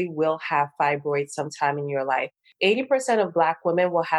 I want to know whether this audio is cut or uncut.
cut